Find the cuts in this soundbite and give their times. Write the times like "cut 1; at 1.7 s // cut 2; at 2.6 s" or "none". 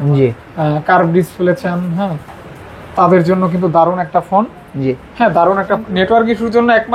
cut 1; at 5.8 s